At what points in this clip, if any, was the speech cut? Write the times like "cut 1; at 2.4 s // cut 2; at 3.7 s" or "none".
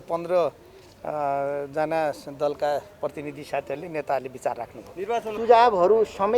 cut 1; at 5.3 s